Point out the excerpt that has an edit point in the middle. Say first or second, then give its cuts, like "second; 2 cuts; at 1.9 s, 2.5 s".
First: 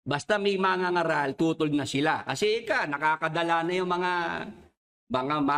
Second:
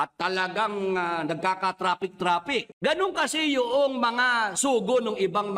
second; 1 cut; at 2.7 s